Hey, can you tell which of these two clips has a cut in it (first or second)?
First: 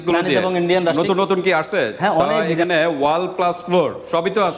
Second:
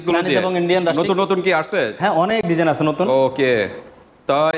first